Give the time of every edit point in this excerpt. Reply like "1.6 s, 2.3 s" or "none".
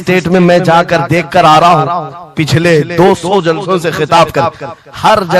none